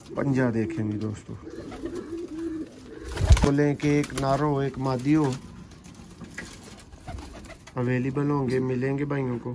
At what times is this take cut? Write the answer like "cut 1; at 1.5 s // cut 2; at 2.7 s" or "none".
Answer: cut 1; at 3.5 s